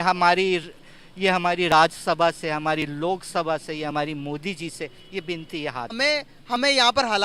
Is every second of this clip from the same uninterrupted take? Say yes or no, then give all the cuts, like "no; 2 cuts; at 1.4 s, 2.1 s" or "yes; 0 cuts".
no; 1 cut; at 5.9 s